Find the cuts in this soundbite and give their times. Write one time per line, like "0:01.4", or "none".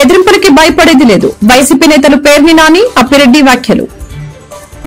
0:03.9